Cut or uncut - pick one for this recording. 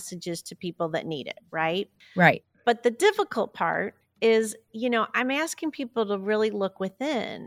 cut